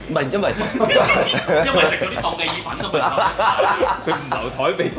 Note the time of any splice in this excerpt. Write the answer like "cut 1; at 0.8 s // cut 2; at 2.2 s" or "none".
none